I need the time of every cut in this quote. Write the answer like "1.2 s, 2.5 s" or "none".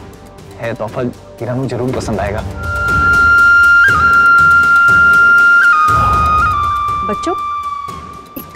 3.0 s